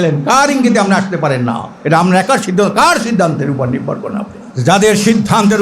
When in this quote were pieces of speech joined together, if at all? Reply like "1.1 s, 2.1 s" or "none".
1.7 s, 4.4 s